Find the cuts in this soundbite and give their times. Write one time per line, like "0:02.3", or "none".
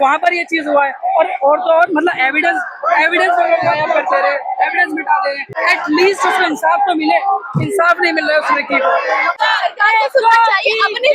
0:05.5
0:09.3